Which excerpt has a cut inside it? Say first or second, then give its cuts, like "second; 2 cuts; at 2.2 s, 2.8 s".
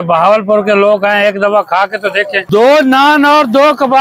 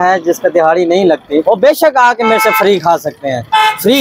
first; 1 cut; at 2.4 s